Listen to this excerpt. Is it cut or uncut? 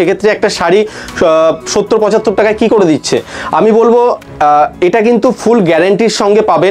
uncut